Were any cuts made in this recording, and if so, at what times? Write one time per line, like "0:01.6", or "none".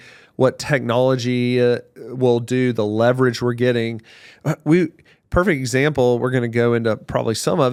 none